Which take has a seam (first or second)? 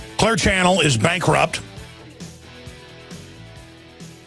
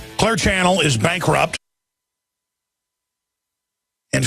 first